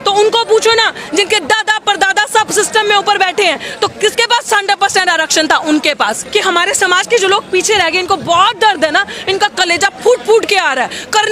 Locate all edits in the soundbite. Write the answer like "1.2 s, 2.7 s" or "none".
6.2 s